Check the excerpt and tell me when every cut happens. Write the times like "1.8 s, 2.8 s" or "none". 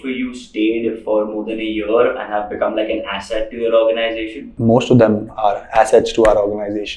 4.5 s